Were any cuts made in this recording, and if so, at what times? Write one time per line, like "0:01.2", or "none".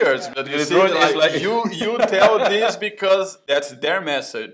0:03.4